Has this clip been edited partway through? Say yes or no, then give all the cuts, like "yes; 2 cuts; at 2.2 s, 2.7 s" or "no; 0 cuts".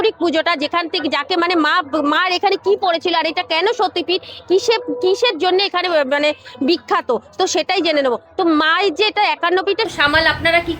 yes; 1 cut; at 9.9 s